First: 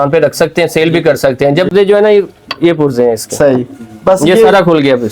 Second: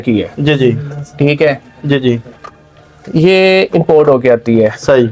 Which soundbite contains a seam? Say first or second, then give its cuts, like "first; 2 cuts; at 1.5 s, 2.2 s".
first; 1 cut; at 1.7 s